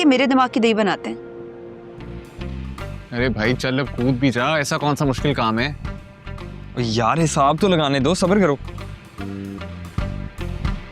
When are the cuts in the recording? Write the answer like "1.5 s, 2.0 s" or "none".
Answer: 2.4 s